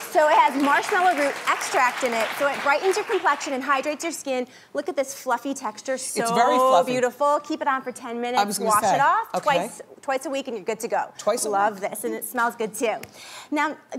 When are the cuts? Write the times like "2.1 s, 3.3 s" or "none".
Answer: 9.3 s